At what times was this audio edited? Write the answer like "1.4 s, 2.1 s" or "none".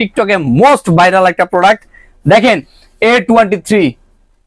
none